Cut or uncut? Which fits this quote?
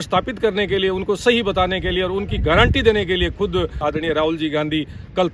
cut